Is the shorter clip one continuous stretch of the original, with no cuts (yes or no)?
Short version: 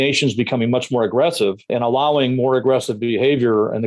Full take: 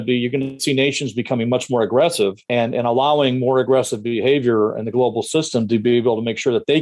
no